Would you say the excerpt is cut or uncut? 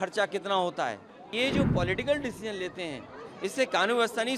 cut